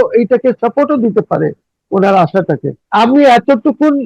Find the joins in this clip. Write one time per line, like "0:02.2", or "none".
0:02.8